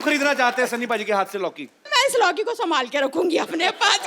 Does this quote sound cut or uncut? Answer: cut